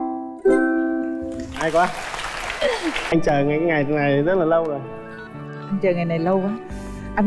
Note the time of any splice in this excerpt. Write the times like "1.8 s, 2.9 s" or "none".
3.1 s